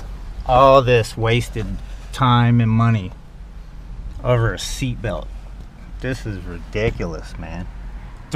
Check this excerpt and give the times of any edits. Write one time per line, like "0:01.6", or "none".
none